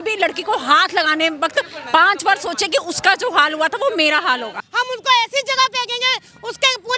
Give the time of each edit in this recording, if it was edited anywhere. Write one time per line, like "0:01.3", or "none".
0:04.7